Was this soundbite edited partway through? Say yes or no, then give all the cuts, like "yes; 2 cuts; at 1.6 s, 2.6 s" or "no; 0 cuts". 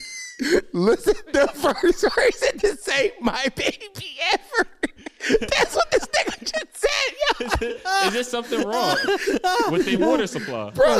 yes; 1 cut; at 1.3 s